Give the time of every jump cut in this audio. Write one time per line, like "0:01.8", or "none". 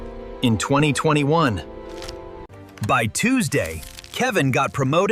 none